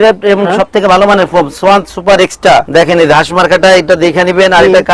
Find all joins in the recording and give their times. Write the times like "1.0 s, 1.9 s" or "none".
2.7 s